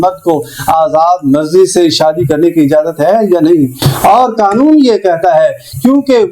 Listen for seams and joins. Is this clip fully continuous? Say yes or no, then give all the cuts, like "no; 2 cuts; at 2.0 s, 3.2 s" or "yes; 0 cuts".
yes; 0 cuts